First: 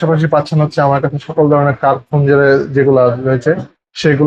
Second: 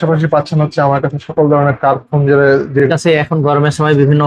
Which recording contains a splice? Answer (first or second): second